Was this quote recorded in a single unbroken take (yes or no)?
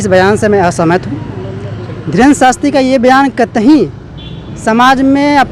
yes